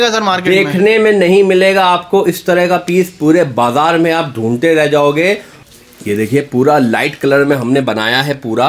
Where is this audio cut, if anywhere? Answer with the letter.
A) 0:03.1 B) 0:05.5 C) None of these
B